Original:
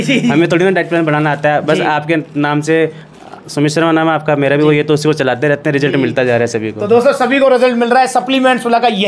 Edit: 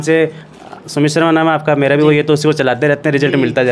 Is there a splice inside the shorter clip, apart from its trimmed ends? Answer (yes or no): no